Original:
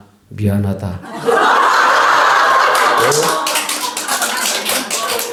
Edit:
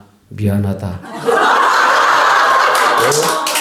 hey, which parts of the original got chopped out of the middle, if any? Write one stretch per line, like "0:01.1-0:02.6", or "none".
none